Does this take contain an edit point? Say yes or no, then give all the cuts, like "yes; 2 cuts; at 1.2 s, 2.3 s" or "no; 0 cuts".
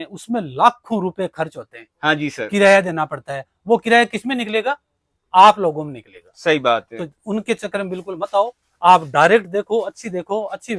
no; 0 cuts